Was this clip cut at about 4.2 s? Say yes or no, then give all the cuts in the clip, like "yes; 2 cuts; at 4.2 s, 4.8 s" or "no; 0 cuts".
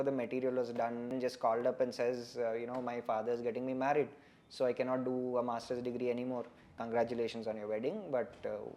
no; 2 cuts; at 1.1 s, 6.7 s